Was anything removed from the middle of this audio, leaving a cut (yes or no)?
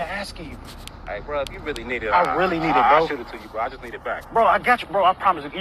no